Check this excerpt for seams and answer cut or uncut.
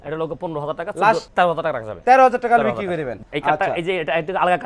cut